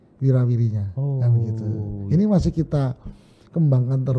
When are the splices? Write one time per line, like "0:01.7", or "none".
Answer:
none